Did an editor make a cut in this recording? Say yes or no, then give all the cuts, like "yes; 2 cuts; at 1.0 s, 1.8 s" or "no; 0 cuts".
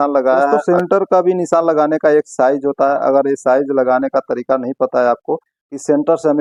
no; 0 cuts